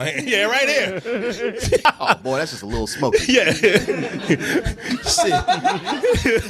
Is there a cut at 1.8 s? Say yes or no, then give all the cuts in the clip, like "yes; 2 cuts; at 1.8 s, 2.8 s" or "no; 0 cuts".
yes; 1 cut; at 1.8 s